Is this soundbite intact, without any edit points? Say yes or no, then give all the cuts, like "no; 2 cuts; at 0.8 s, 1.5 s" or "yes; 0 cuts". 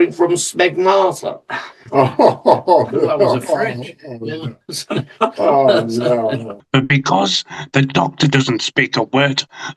no; 1 cut; at 6.5 s